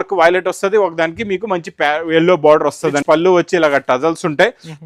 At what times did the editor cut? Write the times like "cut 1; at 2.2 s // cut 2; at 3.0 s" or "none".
cut 1; at 3.0 s